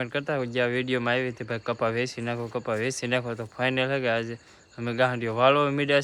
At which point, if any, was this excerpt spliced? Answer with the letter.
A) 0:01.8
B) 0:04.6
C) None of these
C